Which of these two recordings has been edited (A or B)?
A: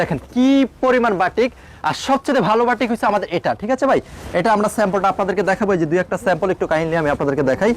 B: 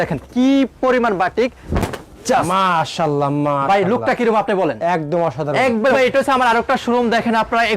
B